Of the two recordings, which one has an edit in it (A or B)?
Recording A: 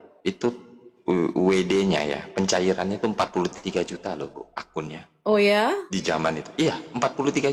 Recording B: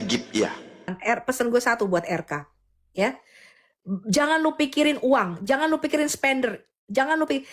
B